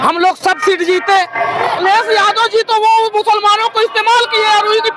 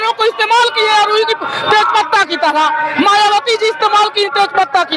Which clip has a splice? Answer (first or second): first